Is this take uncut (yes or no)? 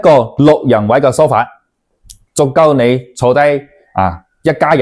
yes